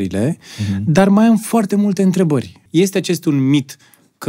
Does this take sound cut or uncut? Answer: cut